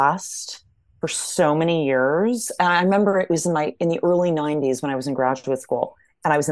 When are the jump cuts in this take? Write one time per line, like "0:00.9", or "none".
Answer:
0:02.6